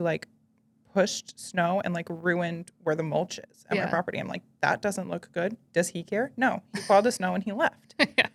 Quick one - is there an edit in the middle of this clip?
no; 0 cuts

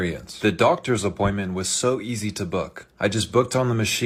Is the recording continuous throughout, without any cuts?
yes; 0 cuts

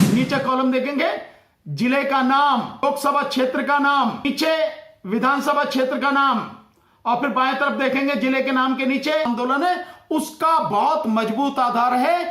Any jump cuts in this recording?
yes; 3 cuts; at 2.8 s, 4.2 s, 9.3 s

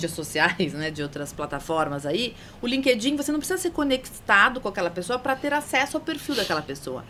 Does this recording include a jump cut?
no; 0 cuts

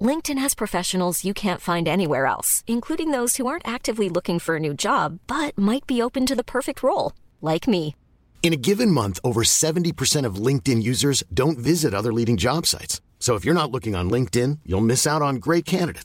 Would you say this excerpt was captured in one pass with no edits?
yes; 0 cuts

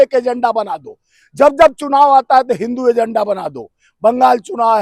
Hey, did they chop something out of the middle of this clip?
no; 0 cuts

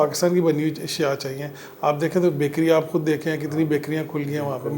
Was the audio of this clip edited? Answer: no; 0 cuts

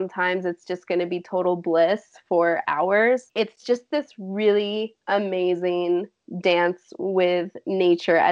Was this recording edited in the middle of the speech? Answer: yes; 2 cuts; at 3.3 s, 6.2 s

